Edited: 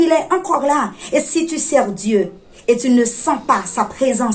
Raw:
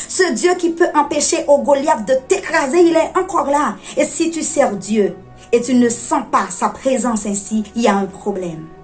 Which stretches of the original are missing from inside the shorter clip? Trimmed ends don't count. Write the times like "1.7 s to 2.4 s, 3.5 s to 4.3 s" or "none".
none